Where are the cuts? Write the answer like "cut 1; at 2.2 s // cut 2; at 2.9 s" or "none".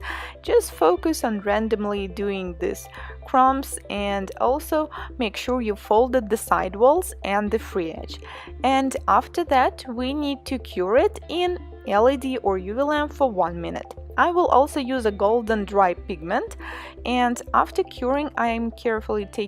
none